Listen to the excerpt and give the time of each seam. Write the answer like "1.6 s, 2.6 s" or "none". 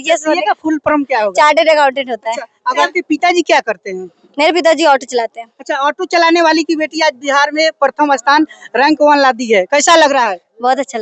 2.8 s

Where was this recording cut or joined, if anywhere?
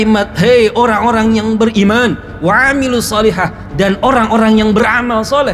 none

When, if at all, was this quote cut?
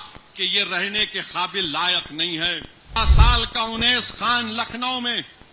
3.0 s

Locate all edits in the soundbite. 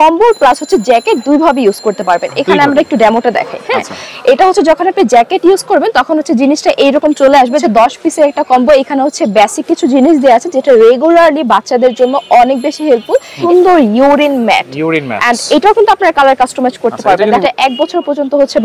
7.6 s, 13.3 s, 17.4 s

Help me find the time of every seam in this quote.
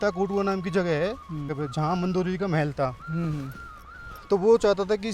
1.6 s

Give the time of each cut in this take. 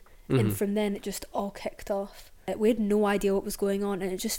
2.5 s

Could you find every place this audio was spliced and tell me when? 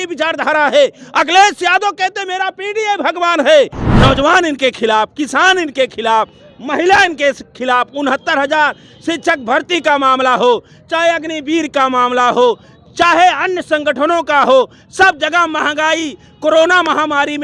3.8 s

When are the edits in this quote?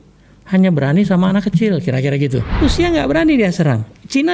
2.6 s

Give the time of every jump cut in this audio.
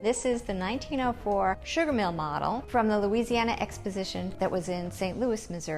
1.6 s, 2.6 s, 4.3 s

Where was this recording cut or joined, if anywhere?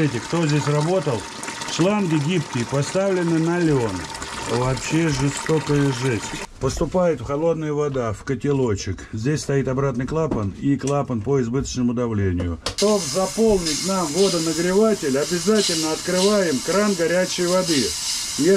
6.4 s, 12.7 s

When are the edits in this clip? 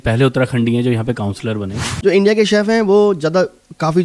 1.8 s

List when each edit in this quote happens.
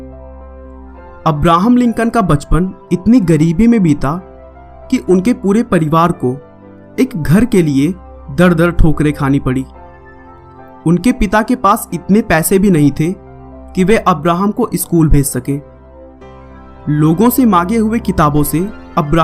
13.9 s

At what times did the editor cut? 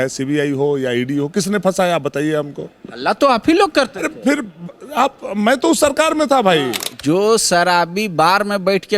6.9 s

